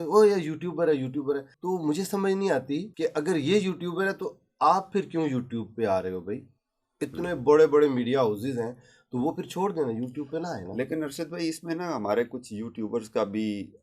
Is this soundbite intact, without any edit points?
no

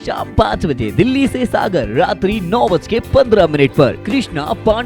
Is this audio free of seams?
yes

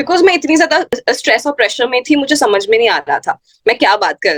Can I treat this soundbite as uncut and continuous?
no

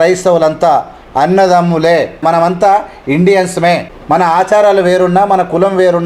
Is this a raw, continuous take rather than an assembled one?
no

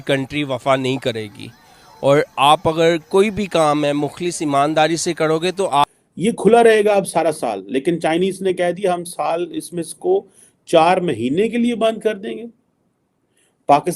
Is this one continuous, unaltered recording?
no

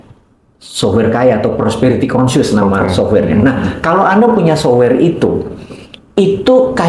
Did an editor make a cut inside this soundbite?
no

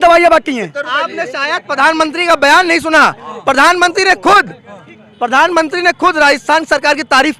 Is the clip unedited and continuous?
yes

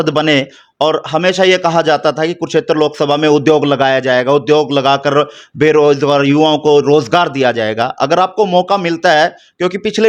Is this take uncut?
yes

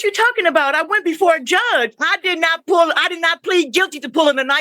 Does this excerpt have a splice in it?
yes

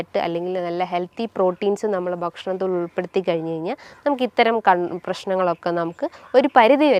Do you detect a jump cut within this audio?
no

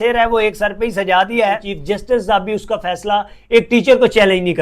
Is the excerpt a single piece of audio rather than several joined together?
no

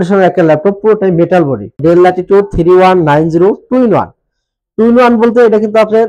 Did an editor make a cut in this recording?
yes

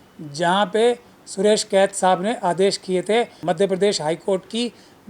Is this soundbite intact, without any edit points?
no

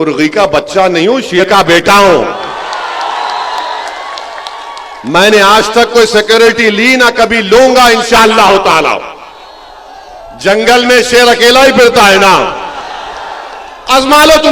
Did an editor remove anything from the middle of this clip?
yes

